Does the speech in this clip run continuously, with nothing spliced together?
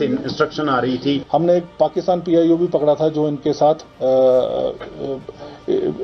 no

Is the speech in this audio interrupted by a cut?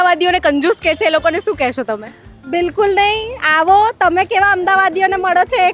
no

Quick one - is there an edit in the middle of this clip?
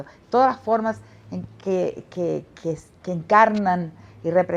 no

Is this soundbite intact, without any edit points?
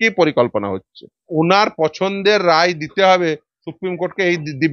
no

